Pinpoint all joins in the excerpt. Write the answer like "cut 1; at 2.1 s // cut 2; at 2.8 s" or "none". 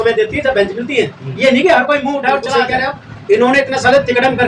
cut 1; at 2.6 s